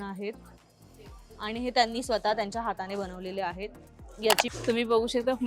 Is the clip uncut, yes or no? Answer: no